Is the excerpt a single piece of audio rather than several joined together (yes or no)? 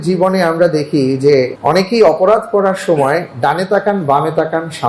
no